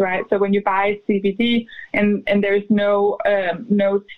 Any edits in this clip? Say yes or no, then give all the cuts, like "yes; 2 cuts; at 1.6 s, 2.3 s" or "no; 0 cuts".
no; 0 cuts